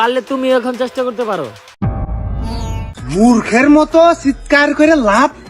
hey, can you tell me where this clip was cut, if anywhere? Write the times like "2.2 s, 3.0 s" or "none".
1.8 s